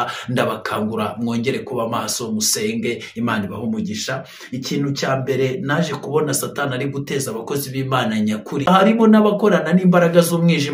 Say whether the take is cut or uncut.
cut